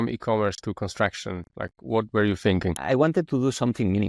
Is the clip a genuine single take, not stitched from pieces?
no; 1 cut; at 2.8 s

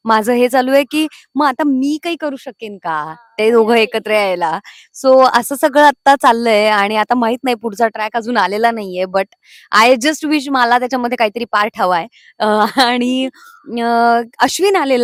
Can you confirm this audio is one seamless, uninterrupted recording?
yes; 0 cuts

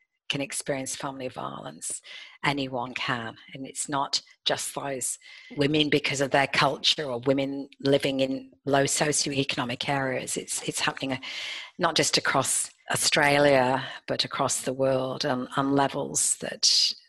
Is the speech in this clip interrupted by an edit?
no; 0 cuts

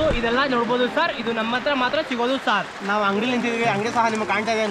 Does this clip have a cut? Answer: no; 0 cuts

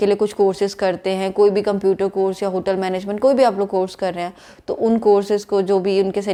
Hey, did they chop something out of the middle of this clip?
no; 0 cuts

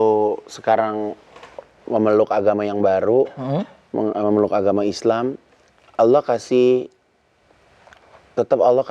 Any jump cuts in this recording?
no; 0 cuts

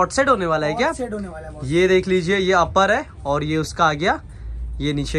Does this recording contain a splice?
no; 0 cuts

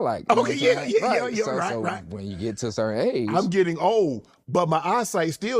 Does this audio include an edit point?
no; 0 cuts

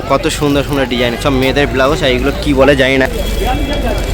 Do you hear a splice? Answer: yes; 1 cut; at 3.1 s

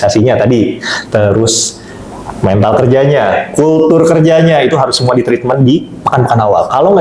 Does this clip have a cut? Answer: no; 0 cuts

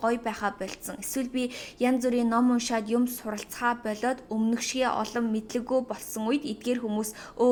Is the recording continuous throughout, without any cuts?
yes; 0 cuts

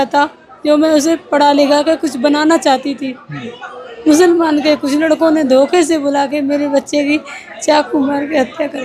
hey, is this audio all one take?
yes; 0 cuts

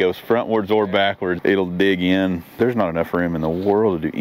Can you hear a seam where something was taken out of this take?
yes; 2 cuts; at 1.4 s, 2.6 s

